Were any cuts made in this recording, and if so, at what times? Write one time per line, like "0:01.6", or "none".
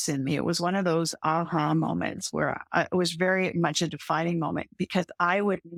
none